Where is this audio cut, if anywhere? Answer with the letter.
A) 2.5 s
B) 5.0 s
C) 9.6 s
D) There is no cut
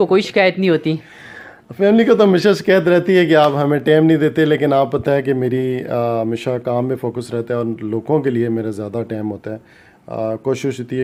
D